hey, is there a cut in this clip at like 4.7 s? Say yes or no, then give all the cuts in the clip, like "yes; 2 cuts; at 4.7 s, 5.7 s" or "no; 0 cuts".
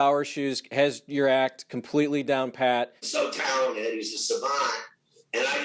no; 1 cut; at 3.0 s